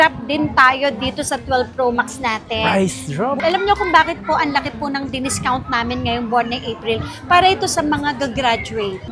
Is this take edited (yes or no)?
no